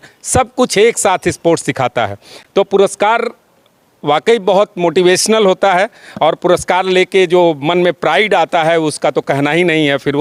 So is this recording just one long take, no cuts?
yes; 0 cuts

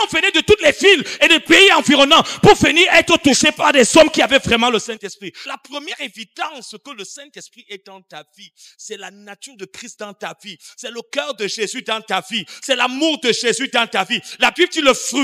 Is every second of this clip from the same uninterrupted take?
no; 1 cut; at 5.4 s

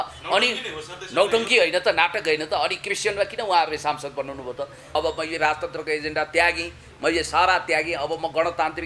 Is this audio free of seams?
no; 1 cut; at 5.0 s

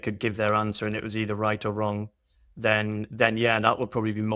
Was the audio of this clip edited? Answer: no; 0 cuts

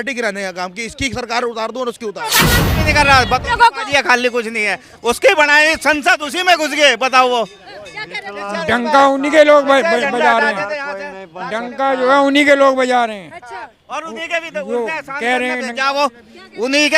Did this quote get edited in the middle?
yes; 1 cut; at 2.4 s

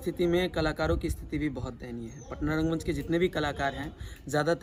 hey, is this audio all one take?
yes; 0 cuts

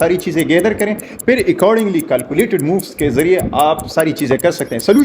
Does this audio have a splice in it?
no; 0 cuts

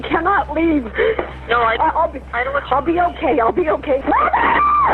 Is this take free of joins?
no; 1 cut; at 4.0 s

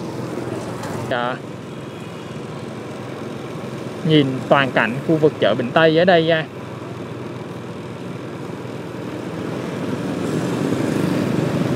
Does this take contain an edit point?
yes; 1 cut; at 1.1 s

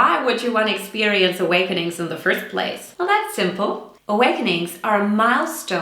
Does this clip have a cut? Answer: yes; 2 cuts; at 2.8 s, 3.9 s

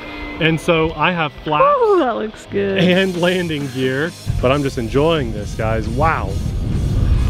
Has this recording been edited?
yes; 1 cut; at 4.2 s

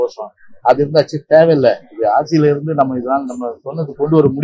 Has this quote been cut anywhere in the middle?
no; 0 cuts

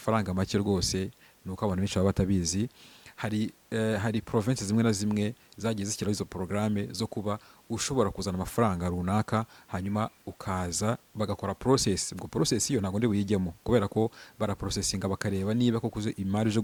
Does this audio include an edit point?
no; 0 cuts

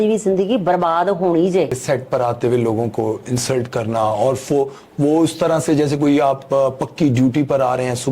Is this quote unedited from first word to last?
no; 1 cut; at 1.8 s

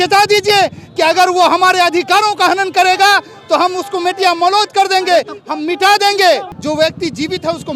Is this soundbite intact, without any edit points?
no; 1 cut; at 6.5 s

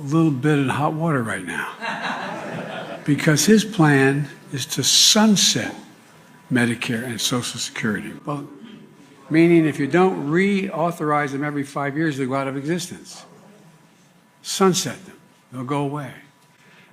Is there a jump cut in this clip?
yes; 1 cut; at 3.0 s

